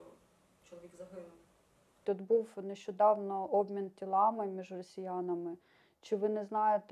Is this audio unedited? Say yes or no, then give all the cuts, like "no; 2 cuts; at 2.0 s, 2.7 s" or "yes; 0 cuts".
no; 1 cut; at 2.0 s